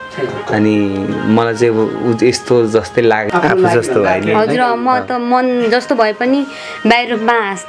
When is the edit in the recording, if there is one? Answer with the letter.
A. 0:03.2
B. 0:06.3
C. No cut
A